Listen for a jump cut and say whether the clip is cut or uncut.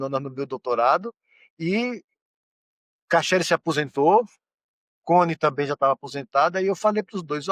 uncut